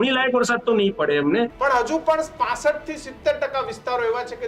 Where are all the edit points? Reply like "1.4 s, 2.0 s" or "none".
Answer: 1.5 s